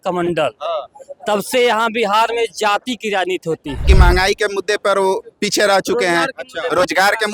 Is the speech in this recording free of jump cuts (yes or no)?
no